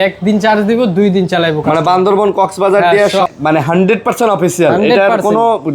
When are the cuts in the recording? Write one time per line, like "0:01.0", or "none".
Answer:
0:03.3

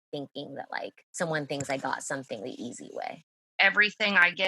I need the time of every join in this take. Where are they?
0:01.0
0:03.4

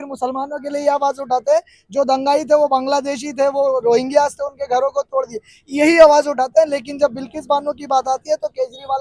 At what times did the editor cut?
none

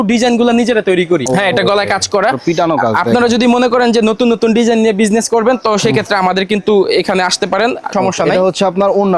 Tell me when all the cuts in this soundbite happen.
none

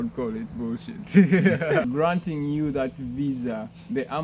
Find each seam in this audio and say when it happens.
0:01.8

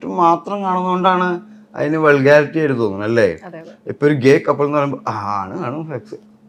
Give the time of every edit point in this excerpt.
none

